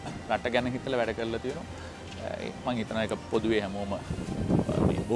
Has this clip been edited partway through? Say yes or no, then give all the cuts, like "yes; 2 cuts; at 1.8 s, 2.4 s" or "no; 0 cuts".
no; 0 cuts